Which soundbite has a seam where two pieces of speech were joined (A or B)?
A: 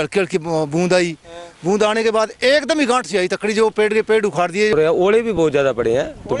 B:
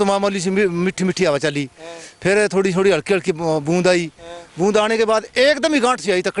A